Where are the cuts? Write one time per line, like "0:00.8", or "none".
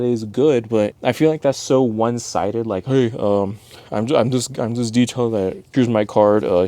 0:01.0
0:05.6